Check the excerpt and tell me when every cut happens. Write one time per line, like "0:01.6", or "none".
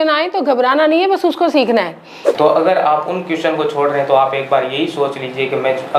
0:02.2